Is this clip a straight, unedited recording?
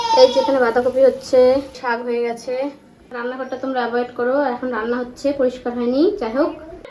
yes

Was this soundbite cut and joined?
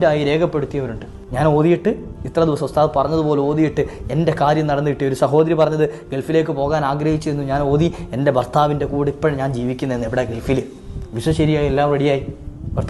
no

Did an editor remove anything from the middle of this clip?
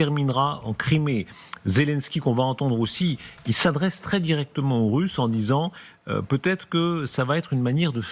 no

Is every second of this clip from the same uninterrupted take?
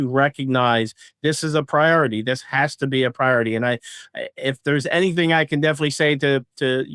yes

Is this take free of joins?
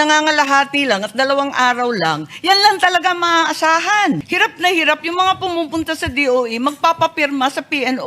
no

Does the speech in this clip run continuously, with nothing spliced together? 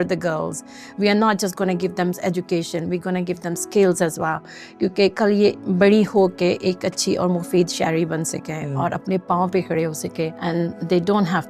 no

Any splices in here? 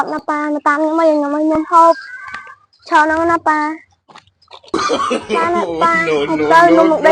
no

